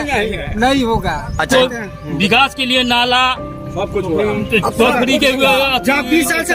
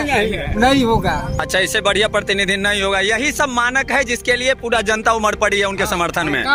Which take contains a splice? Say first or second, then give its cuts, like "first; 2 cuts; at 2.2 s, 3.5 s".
first; 1 cut; at 1.5 s